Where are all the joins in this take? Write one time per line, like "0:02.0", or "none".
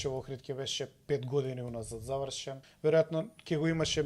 0:02.6